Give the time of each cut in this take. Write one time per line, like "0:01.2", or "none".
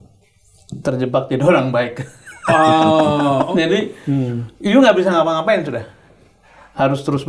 0:03.5